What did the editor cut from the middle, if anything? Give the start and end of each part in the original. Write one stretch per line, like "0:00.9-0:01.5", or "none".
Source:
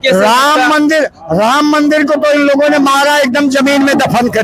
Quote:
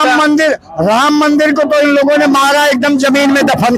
none